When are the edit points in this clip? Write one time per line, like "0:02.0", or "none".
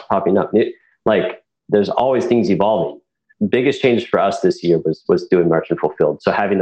0:03.2

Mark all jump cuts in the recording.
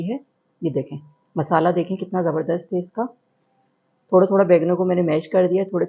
none

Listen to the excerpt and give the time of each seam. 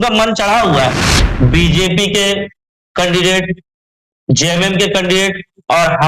0:01.1

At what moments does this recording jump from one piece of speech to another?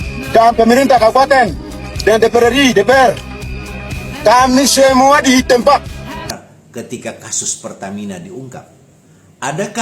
0:06.1

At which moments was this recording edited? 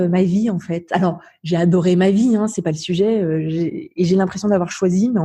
none

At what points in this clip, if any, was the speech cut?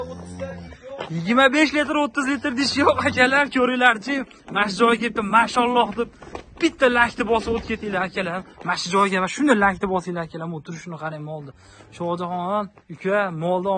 none

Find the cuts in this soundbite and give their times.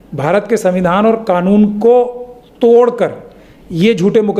none

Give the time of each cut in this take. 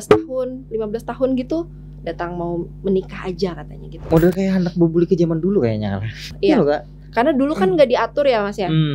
0:04.0
0:06.3

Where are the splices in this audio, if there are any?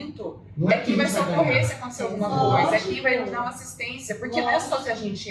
none

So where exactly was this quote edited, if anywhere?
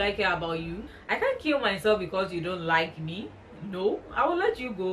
0:01.0

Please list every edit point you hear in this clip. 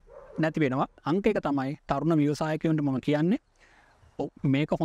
0:01.0

